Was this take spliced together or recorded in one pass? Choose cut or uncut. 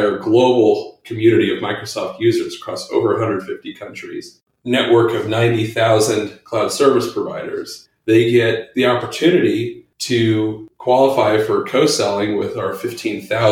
cut